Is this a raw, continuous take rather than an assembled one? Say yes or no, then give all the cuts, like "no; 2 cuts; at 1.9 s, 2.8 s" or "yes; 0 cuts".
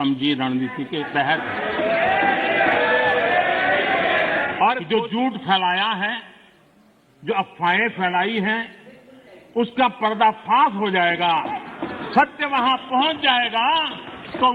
no; 1 cut; at 4.8 s